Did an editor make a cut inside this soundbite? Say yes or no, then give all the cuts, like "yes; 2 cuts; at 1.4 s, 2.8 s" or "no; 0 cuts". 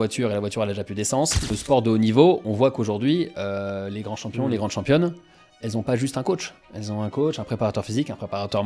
yes; 1 cut; at 1.5 s